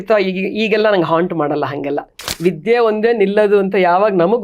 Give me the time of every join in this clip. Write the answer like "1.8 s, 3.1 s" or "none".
2.2 s